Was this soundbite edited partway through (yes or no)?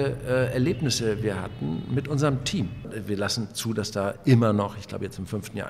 yes